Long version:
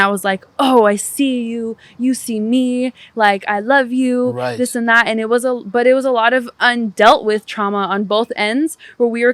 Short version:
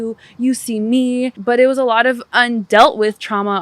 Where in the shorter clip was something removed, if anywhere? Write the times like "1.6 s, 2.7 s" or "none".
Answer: 1.4 s